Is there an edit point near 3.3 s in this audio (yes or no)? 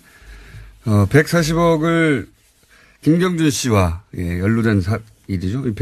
no